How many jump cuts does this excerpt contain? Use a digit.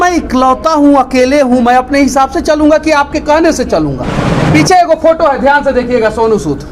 1